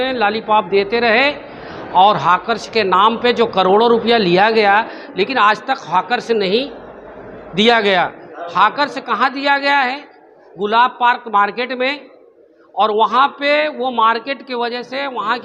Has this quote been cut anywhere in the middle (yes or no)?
no